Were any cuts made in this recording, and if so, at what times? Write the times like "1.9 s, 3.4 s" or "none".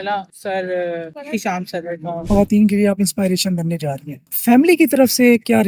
2.2 s, 4.3 s